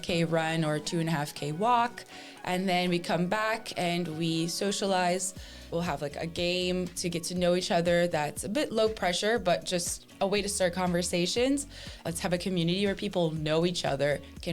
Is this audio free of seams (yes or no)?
no